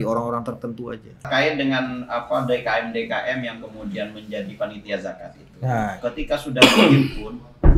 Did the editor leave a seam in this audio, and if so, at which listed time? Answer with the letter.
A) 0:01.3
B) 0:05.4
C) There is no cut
A